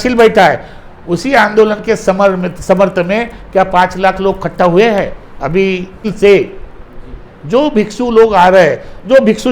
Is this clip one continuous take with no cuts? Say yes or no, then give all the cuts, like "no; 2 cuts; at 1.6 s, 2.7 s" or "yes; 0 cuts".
no; 1 cut; at 6.1 s